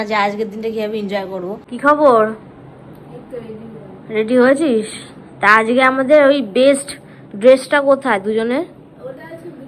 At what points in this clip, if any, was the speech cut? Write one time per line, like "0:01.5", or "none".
0:01.7